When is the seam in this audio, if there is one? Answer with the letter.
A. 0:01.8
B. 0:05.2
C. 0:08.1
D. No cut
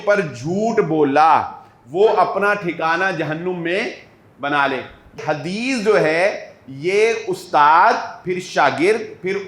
B